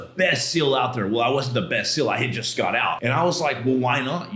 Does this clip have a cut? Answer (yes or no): yes